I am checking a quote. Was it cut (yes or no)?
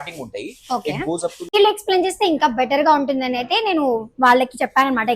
yes